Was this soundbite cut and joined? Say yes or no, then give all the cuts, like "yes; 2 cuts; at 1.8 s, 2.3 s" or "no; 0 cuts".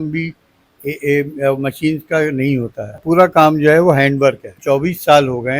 yes; 2 cuts; at 3.0 s, 4.6 s